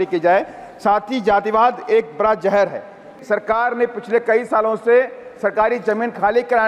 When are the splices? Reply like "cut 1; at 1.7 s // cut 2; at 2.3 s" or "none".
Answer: cut 1; at 3.2 s

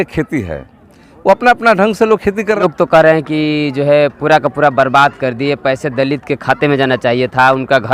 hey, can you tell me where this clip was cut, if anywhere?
cut 1; at 2.6 s

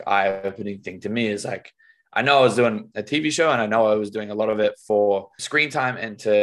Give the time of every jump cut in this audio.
cut 1; at 5.4 s

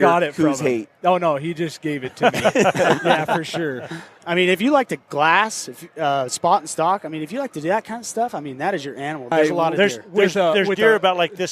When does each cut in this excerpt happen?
cut 1; at 4.1 s // cut 2; at 9.3 s

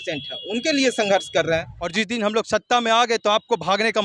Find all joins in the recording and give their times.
cut 1; at 1.8 s

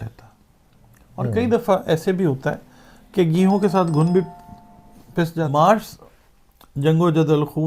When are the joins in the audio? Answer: cut 1; at 5.4 s

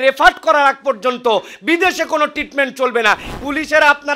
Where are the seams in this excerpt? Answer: cut 1; at 3.3 s

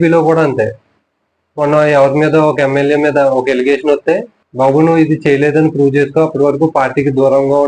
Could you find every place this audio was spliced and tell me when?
cut 1; at 4.4 s

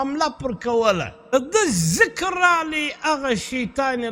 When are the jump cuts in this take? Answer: cut 1; at 1.3 s

